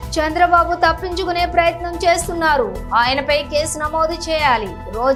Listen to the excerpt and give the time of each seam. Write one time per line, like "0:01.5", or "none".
none

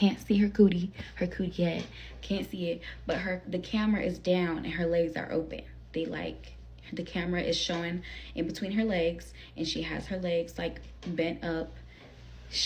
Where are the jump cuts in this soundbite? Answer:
none

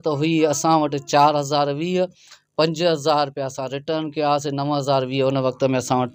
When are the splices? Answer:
none

